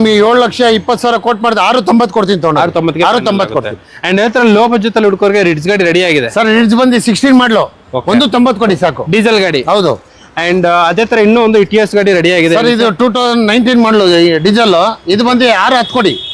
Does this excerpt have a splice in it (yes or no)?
no